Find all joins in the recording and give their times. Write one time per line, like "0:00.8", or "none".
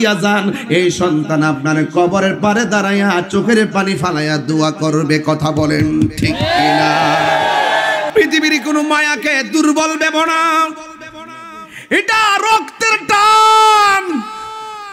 0:08.1